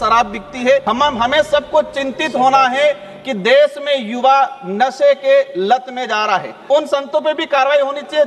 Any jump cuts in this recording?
yes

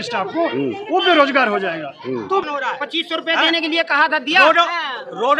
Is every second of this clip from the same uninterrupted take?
no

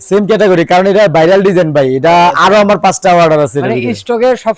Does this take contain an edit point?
no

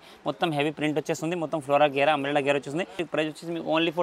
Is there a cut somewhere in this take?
yes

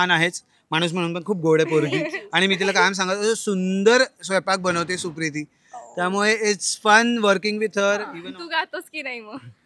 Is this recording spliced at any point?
yes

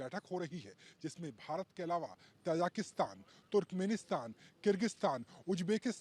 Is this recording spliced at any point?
no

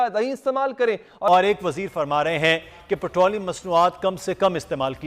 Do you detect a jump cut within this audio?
yes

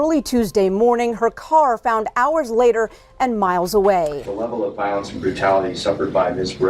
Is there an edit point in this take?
yes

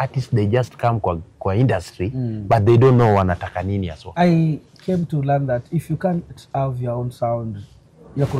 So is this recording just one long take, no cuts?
no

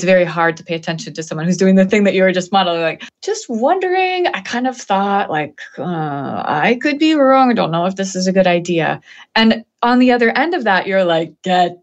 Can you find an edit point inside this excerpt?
yes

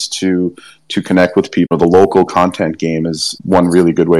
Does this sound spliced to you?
yes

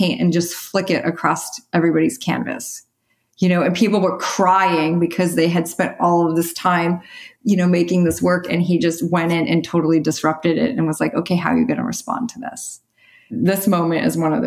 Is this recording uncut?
no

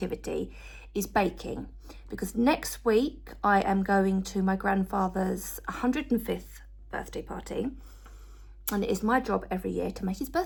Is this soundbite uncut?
yes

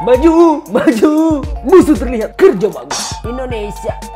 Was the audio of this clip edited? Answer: yes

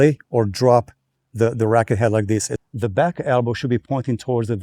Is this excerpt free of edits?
no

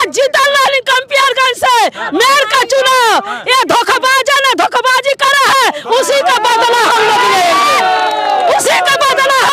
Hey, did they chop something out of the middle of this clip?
no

